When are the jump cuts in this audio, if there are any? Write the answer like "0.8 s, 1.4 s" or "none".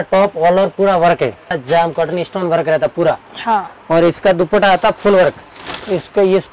1.6 s